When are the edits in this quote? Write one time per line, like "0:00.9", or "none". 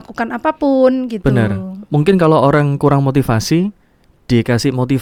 none